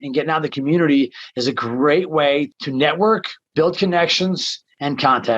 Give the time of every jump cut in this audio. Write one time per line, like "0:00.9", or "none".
0:02.5
0:03.4